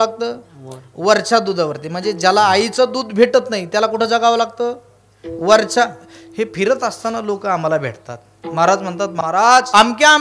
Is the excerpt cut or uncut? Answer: cut